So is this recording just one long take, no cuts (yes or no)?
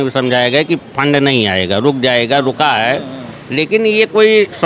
yes